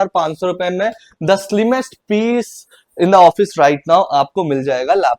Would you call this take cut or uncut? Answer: uncut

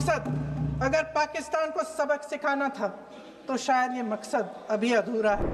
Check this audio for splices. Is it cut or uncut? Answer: uncut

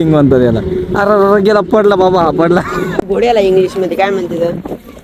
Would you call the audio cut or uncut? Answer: cut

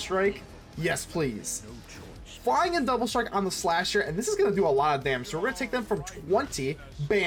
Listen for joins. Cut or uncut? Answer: uncut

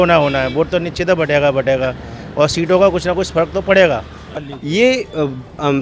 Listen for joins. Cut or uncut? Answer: cut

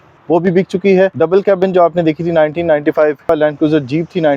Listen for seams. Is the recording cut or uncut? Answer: cut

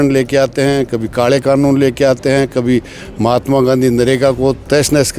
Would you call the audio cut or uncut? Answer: uncut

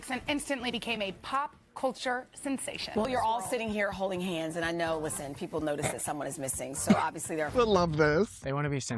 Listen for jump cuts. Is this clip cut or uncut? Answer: cut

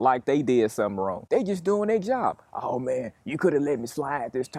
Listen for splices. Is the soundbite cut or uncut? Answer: uncut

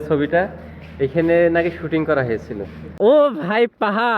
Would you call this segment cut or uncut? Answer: cut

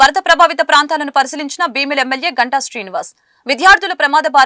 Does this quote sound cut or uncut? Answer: uncut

